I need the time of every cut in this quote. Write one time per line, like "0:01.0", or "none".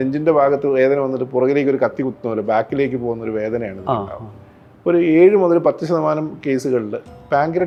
none